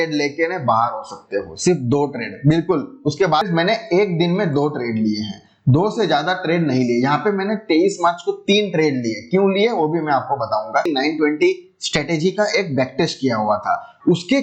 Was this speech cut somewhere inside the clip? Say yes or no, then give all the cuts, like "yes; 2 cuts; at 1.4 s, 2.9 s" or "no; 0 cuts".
yes; 2 cuts; at 3.4 s, 10.9 s